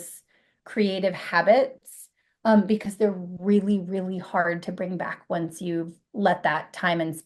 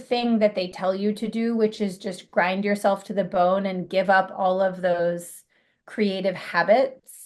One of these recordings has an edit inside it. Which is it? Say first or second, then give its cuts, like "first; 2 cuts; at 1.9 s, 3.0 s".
first; 1 cut; at 6.0 s